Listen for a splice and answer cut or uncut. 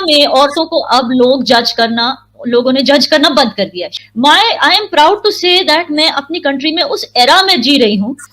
cut